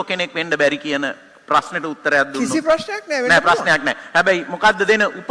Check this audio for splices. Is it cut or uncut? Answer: uncut